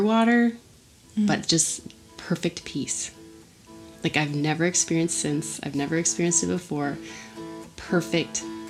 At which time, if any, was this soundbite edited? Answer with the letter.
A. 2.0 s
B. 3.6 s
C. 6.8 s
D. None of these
D